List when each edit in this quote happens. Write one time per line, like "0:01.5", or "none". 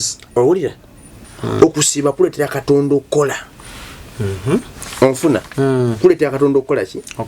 0:01.3